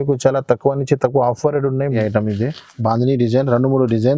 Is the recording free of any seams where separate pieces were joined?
no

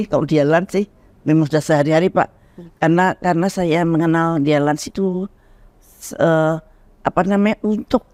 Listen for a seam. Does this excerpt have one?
no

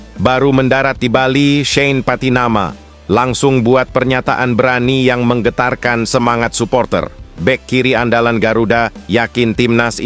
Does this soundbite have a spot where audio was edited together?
no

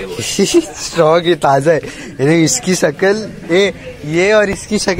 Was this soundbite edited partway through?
no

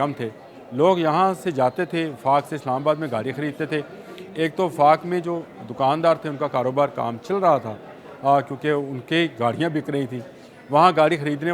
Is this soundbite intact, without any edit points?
yes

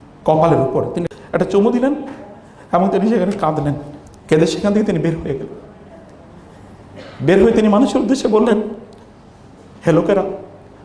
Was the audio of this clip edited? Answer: yes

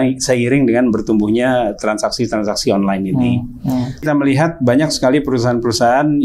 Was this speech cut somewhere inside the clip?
yes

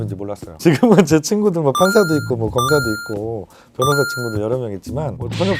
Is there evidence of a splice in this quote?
no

